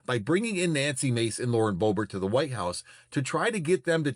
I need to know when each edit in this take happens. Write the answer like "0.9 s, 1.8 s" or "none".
none